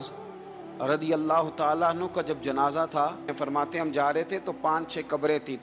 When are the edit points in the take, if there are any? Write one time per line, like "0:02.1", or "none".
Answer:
0:03.3